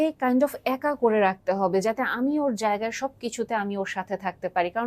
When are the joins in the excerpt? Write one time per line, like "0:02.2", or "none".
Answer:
none

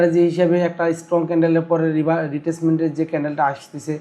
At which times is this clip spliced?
none

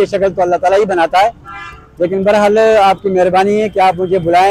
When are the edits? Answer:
none

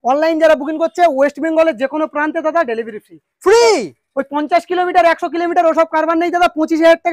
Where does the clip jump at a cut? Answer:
none

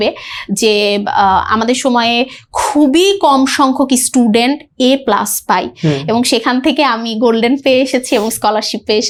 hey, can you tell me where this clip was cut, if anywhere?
none

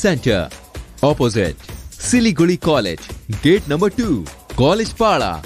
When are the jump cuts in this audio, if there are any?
none

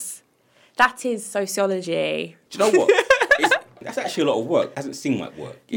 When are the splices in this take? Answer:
0:02.4
0:03.8
0:04.8

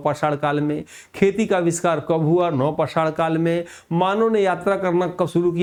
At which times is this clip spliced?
none

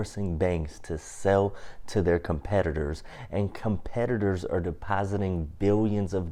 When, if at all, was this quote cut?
none

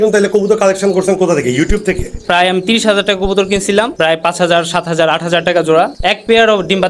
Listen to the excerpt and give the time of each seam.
0:02.2

